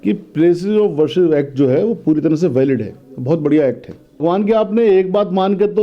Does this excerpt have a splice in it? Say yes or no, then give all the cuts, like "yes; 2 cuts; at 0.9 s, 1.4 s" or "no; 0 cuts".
yes; 1 cut; at 4.2 s